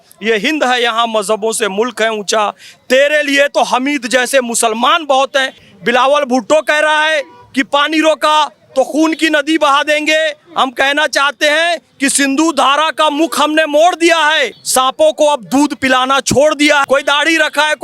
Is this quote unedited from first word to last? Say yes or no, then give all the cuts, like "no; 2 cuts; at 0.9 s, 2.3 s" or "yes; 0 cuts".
no; 3 cuts; at 5.6 s, 14.6 s, 16.8 s